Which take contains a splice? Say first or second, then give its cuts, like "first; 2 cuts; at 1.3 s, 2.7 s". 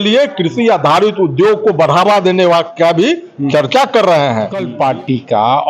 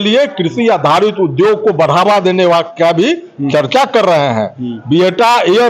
first; 1 cut; at 4.7 s